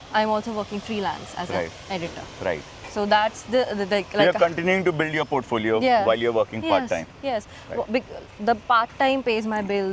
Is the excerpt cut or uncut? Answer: uncut